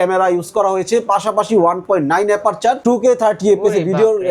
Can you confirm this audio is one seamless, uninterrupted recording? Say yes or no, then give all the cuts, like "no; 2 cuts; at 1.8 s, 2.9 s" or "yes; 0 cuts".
no; 1 cut; at 2.8 s